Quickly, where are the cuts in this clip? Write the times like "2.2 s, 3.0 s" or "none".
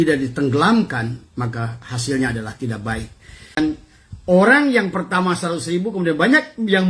3.6 s